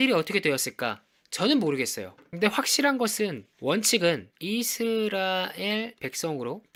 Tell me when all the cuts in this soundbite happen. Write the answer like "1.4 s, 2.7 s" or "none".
none